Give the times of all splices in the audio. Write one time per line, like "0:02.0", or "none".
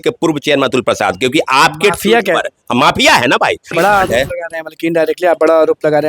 0:03.7